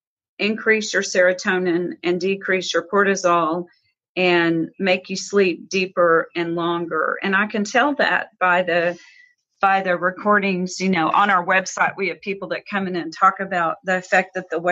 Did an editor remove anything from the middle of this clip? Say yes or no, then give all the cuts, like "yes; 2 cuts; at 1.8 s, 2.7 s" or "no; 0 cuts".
no; 0 cuts